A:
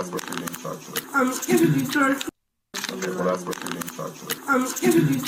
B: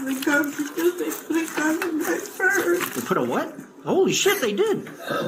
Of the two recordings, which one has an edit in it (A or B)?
A